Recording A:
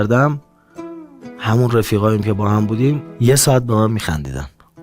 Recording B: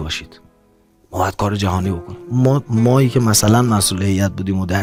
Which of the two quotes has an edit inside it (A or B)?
A